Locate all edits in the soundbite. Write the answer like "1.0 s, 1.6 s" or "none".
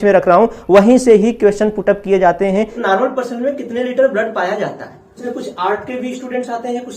2.8 s, 5.2 s